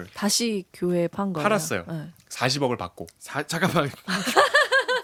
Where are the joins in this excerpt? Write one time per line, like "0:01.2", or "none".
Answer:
none